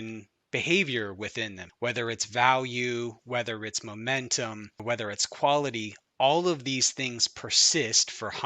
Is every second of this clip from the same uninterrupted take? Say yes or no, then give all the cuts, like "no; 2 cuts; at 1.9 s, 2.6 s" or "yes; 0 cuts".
no; 2 cuts; at 1.6 s, 4.8 s